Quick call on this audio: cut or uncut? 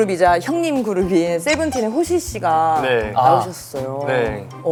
uncut